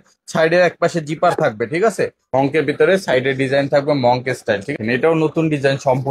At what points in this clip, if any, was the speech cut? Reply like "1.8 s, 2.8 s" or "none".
2.2 s, 4.7 s